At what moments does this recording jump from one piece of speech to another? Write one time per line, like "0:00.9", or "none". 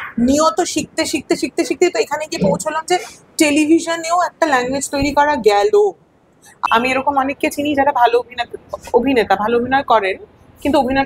0:06.5